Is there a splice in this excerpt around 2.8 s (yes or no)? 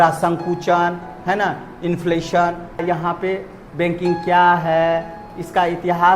yes